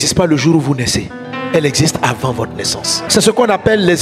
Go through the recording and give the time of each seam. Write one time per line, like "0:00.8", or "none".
0:03.1